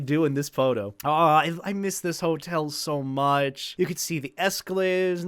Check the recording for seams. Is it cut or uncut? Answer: cut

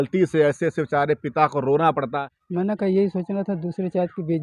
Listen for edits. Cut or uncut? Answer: cut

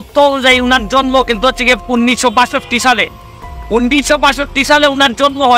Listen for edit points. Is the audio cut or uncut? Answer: uncut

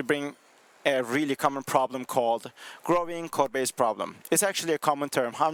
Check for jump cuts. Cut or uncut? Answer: uncut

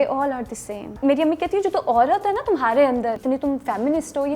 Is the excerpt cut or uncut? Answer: cut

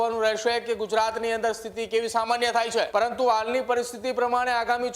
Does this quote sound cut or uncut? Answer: cut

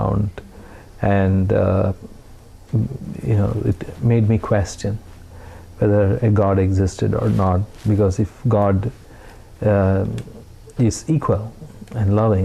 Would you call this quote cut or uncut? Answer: uncut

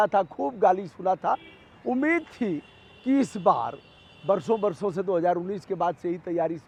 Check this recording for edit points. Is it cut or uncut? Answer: uncut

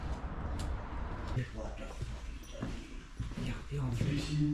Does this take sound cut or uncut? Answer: cut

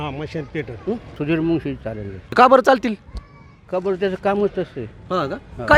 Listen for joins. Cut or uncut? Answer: cut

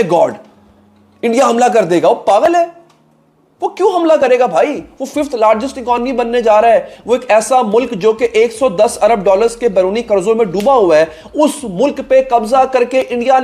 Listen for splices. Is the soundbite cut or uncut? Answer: uncut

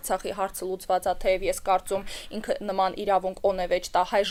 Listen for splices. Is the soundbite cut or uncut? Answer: uncut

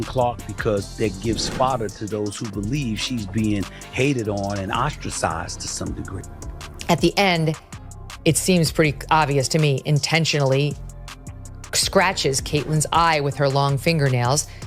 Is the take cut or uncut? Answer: cut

